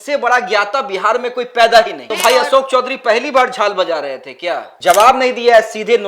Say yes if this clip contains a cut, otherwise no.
yes